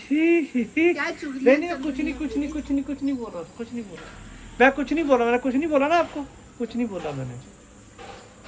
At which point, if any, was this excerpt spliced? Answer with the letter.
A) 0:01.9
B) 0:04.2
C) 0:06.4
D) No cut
D